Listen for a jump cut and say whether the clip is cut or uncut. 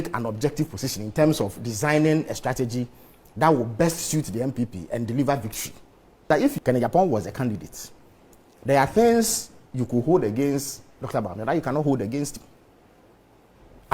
cut